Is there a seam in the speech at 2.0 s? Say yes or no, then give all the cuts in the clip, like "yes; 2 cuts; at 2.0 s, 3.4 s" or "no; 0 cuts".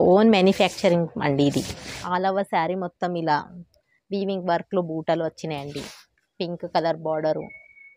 yes; 1 cut; at 2.0 s